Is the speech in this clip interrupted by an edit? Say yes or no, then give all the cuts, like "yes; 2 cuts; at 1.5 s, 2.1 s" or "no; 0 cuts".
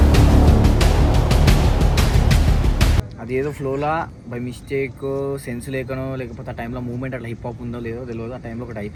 no; 0 cuts